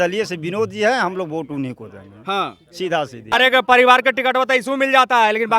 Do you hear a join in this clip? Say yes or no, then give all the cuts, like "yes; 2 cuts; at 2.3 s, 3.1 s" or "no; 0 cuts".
yes; 1 cut; at 3.3 s